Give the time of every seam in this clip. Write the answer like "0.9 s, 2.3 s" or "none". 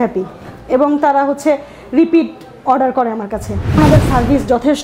3.8 s